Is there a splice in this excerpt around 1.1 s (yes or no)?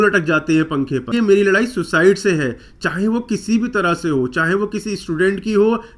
yes